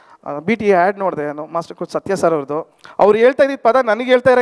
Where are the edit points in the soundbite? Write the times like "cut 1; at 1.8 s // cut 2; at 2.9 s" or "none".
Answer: cut 1; at 2.8 s

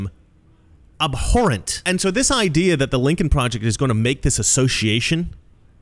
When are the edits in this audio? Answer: cut 1; at 1.7 s

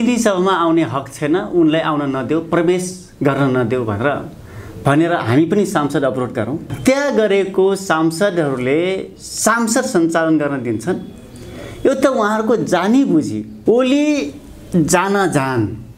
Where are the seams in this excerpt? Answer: cut 1; at 6.7 s // cut 2; at 13.5 s

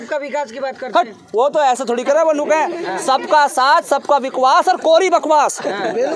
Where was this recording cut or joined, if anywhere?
none

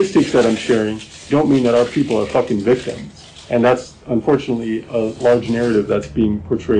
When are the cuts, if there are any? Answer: none

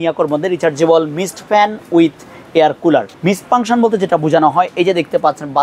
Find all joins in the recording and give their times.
cut 1; at 3.1 s

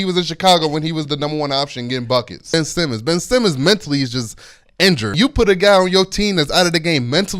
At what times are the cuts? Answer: cut 1; at 2.5 s // cut 2; at 5.1 s

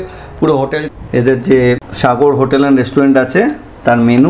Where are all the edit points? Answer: cut 1; at 0.8 s // cut 2; at 1.9 s

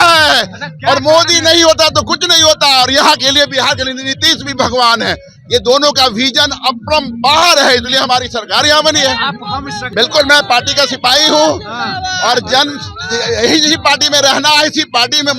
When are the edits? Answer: cut 1; at 9.9 s

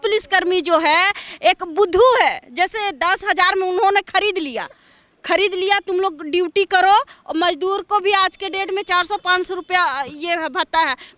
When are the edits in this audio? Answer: none

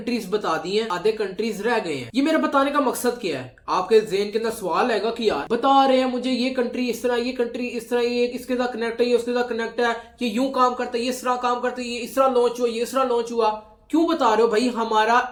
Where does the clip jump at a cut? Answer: none

